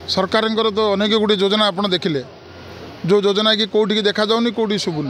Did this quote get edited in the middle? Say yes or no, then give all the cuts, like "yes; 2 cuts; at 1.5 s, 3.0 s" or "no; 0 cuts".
no; 0 cuts